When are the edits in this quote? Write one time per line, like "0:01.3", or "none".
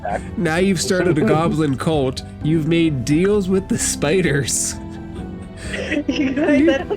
0:04.6
0:05.8

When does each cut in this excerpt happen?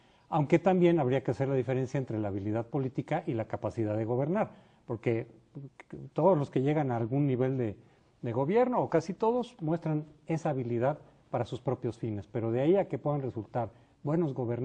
none

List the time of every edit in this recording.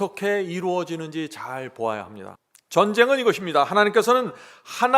0:02.3

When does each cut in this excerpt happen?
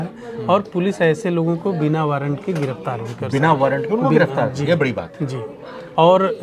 none

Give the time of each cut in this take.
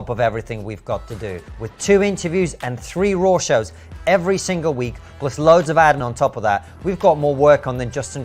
0:06.1

